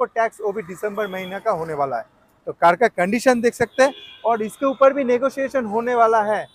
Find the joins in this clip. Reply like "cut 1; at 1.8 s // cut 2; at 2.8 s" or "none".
none

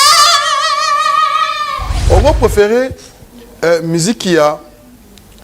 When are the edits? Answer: cut 1; at 1.9 s

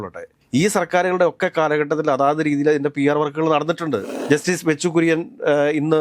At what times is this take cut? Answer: cut 1; at 4.1 s

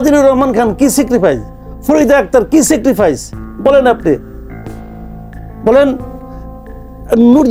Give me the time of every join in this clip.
none

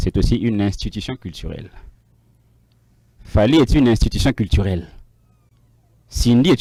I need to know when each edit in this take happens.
none

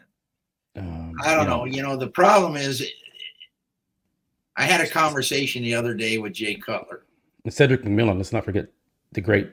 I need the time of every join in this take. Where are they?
none

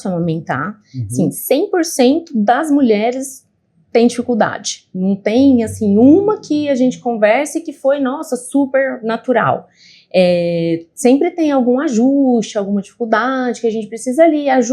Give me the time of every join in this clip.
none

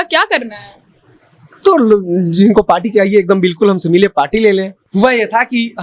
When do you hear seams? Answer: cut 1; at 4.8 s

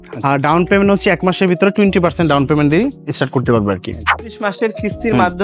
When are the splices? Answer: cut 1; at 4.4 s

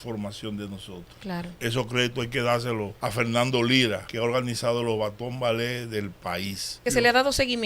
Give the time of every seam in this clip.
cut 1; at 1.5 s // cut 2; at 3.0 s // cut 3; at 4.1 s // cut 4; at 6.8 s

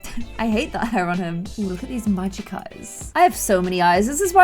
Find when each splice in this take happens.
cut 1; at 1.5 s // cut 2; at 3.0 s

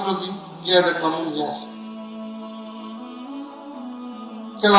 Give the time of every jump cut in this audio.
cut 1; at 2.2 s // cut 2; at 3.9 s

